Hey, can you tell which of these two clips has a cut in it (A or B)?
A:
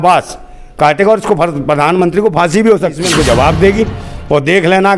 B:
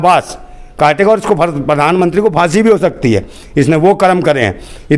A